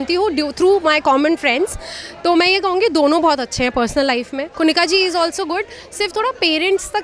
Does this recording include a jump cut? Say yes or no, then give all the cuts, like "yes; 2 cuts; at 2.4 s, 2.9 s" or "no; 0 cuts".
yes; 1 cut; at 4.4 s